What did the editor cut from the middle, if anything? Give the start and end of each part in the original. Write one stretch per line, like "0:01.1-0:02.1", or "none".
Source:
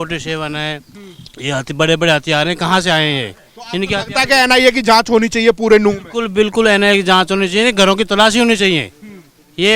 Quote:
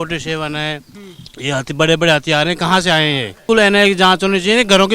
0:03.4-0:06.5